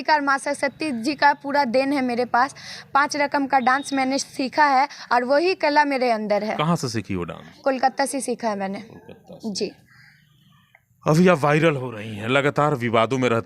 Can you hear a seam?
no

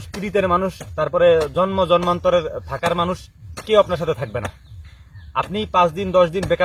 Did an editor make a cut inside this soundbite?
no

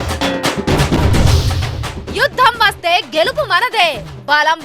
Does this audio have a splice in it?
no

